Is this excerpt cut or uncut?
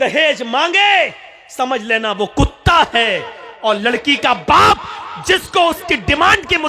uncut